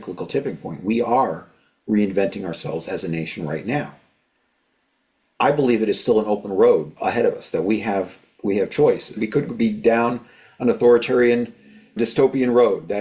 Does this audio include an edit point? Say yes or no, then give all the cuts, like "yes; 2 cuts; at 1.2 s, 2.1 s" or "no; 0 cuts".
yes; 3 cuts; at 6.9 s, 9.2 s, 11.9 s